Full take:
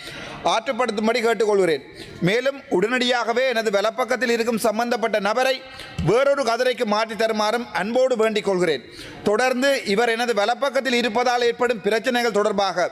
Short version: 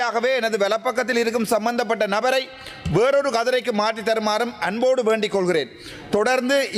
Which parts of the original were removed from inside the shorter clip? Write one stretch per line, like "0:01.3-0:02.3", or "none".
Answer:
none